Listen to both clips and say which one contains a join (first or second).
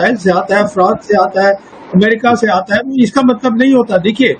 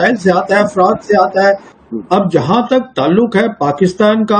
second